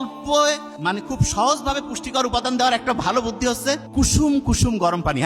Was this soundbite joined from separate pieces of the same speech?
yes; 2 cuts; at 0.9 s, 3.8 s

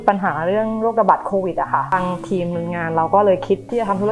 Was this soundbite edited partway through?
no; 0 cuts

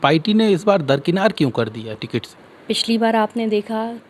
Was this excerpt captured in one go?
no; 1 cut; at 2.4 s

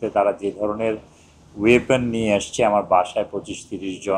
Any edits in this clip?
no; 0 cuts

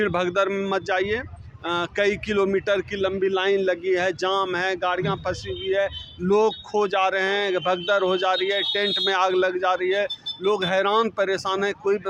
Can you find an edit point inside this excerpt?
no; 0 cuts

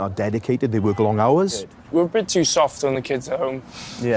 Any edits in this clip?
yes; 1 cut; at 1.7 s

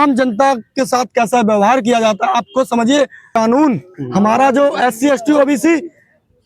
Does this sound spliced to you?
yes; 1 cut; at 3.3 s

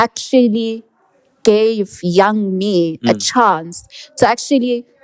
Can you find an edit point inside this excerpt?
no; 0 cuts

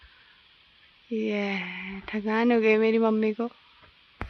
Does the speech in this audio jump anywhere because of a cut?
no; 0 cuts

